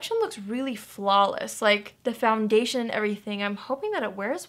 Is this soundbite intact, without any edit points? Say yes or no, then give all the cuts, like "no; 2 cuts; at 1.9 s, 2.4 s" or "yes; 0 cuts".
yes; 0 cuts